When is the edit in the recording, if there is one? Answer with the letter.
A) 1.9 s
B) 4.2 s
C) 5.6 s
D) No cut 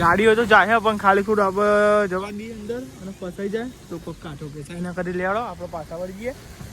D